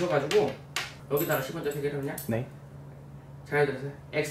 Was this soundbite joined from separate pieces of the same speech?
no; 0 cuts

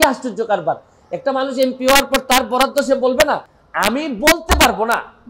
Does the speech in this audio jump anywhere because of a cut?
yes; 1 cut; at 3.5 s

